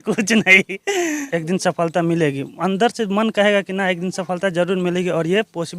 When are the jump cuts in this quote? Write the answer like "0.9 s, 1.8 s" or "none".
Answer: 1.2 s